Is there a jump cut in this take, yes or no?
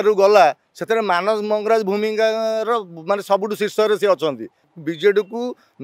yes